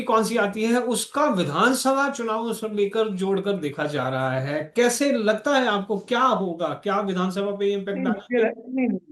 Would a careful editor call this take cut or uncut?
uncut